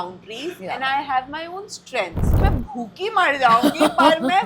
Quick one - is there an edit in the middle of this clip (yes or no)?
yes